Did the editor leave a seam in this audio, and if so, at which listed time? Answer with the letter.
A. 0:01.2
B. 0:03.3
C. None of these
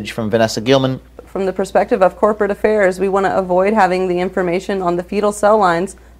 A